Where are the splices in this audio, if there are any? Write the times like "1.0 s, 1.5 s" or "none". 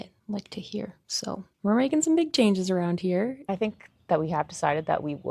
3.5 s